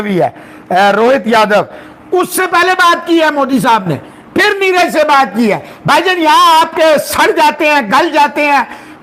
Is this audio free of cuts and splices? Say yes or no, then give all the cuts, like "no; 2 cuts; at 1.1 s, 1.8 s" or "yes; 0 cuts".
yes; 0 cuts